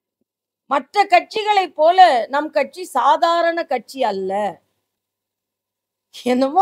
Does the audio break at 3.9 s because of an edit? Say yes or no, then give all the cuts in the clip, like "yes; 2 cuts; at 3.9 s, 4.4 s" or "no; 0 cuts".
no; 0 cuts